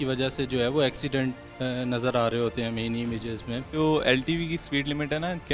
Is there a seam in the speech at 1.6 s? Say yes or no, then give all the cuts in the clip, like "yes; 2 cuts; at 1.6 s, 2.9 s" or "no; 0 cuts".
no; 1 cut; at 3.7 s